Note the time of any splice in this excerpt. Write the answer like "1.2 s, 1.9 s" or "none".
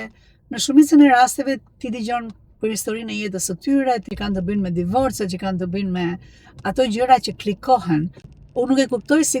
4.1 s, 8.2 s